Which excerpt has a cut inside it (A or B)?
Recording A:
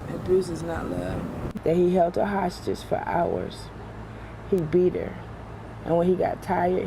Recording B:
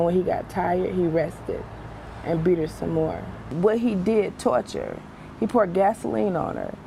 A